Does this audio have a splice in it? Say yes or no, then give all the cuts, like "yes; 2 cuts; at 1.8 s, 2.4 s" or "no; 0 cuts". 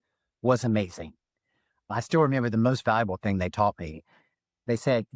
yes; 1 cut; at 2.5 s